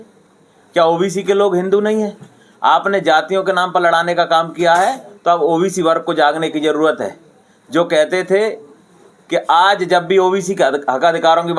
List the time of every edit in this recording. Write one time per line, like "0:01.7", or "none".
none